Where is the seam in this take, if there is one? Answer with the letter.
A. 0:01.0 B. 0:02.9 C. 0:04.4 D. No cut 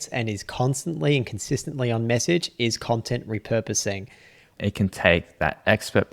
C